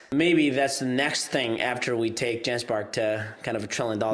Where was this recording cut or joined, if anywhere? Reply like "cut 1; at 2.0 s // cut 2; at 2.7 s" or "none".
none